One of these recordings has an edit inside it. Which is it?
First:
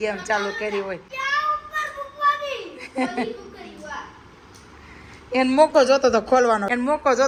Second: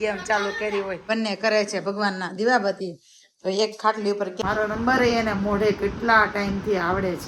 second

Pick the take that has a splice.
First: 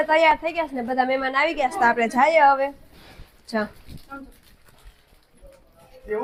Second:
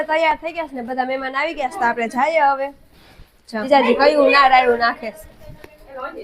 second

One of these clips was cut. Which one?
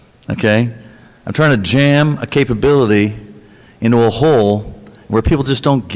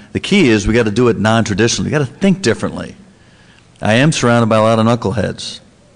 second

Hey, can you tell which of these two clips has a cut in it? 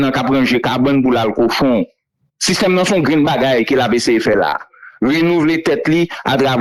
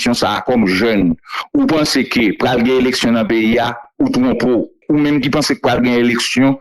second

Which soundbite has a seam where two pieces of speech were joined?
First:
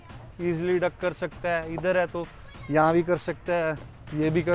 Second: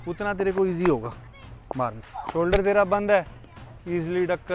second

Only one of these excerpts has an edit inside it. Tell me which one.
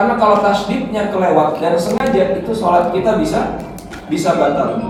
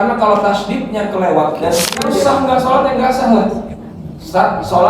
second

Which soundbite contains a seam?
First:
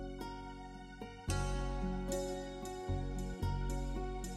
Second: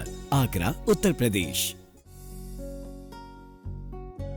second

